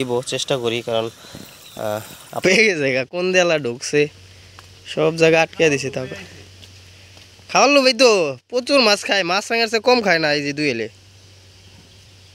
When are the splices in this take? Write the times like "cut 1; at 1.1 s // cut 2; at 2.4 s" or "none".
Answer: cut 1; at 2.4 s